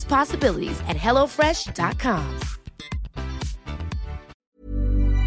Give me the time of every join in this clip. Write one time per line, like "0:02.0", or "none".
0:04.3